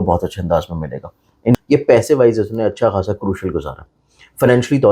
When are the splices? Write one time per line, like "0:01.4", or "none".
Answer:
0:01.5